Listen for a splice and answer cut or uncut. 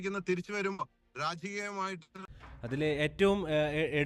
cut